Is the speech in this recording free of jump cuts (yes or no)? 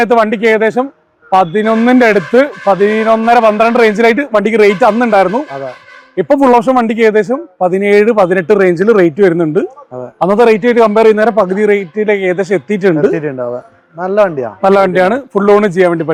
yes